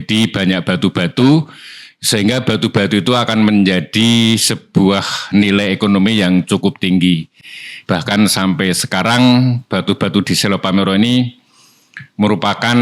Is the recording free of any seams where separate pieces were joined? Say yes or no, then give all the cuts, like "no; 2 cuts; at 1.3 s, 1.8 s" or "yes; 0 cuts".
yes; 0 cuts